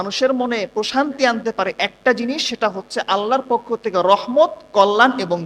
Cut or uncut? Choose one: uncut